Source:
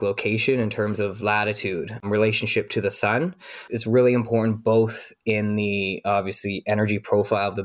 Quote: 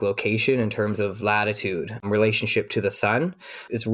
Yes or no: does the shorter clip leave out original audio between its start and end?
no